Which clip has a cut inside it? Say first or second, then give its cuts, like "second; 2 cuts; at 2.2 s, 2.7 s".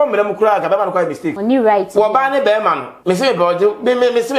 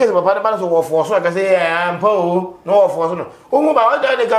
first; 2 cuts; at 1.4 s, 2.9 s